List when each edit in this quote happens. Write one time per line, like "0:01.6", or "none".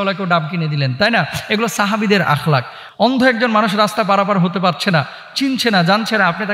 none